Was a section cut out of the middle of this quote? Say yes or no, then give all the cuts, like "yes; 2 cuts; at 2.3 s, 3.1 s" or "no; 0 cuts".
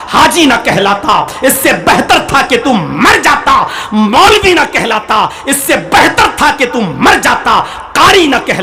no; 0 cuts